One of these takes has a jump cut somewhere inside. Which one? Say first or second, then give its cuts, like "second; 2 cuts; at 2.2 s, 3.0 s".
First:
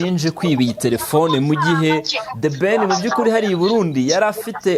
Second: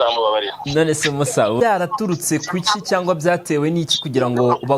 second; 1 cut; at 1.6 s